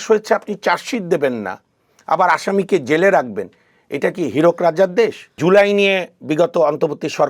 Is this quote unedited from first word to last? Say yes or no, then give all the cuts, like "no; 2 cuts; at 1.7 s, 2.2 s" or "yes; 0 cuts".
no; 1 cut; at 5.3 s